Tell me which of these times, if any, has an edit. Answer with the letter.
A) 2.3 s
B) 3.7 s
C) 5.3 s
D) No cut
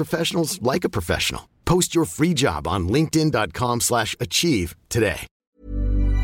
C